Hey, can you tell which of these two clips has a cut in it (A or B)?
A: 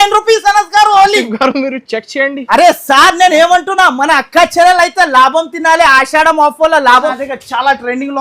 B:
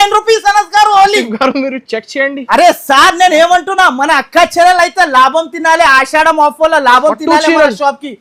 A